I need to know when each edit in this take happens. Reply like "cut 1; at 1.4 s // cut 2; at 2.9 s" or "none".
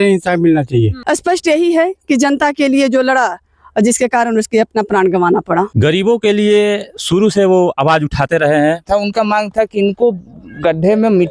cut 1; at 1.0 s // cut 2; at 5.7 s // cut 3; at 8.8 s